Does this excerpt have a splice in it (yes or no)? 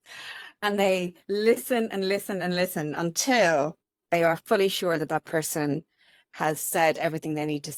no